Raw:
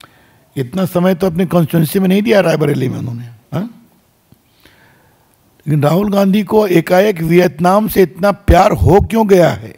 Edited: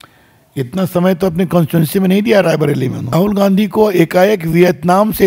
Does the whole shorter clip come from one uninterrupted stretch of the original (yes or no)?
no